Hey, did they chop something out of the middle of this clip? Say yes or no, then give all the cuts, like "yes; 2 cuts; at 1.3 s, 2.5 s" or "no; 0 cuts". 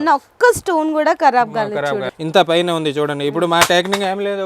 yes; 1 cut; at 2.1 s